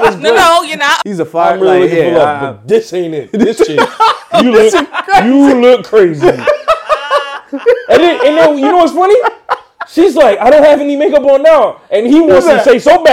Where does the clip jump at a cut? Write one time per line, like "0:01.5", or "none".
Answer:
0:00.9